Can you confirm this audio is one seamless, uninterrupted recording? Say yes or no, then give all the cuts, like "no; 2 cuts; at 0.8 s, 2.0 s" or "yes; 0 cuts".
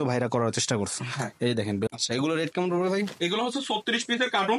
no; 1 cut; at 1.9 s